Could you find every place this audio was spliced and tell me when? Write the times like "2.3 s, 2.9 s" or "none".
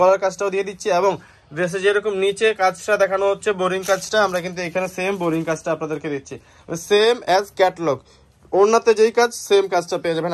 none

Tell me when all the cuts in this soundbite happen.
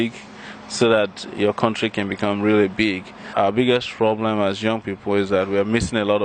3.3 s

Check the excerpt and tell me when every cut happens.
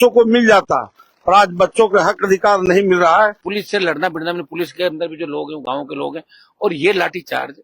3.5 s

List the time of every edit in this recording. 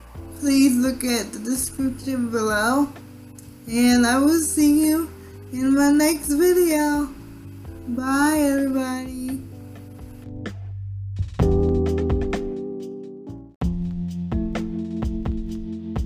13.4 s

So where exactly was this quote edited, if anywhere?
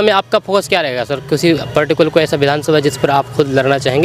none

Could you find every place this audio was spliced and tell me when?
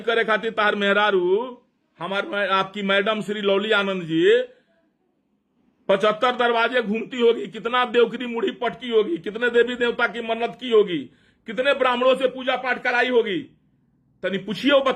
none

